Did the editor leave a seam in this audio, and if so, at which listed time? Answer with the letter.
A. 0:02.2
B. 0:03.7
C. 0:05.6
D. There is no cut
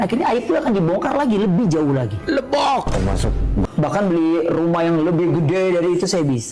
B